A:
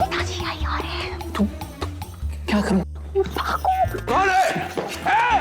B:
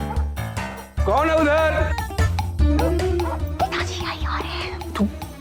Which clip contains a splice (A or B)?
A